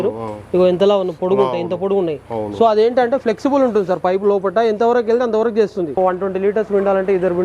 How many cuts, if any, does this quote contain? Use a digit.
1